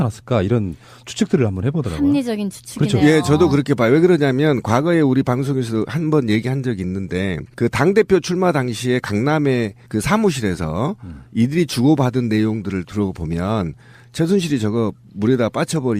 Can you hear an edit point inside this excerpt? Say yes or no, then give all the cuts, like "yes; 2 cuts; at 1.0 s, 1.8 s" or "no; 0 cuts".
yes; 1 cut; at 15.0 s